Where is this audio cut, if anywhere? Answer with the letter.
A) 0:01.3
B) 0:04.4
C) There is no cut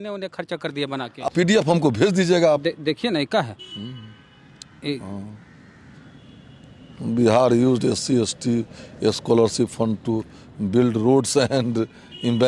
A